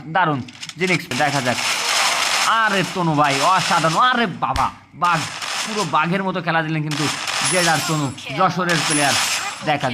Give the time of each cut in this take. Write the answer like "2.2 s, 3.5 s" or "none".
1.1 s